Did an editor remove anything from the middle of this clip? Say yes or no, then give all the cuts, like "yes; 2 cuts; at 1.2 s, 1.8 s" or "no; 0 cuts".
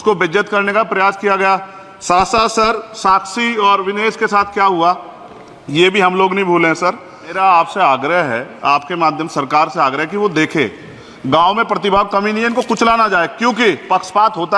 yes; 1 cut; at 7.4 s